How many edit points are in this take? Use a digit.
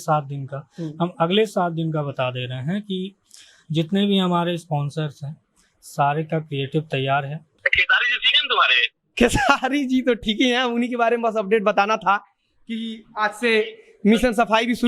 1